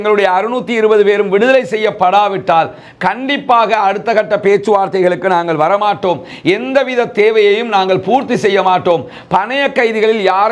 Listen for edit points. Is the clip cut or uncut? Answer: uncut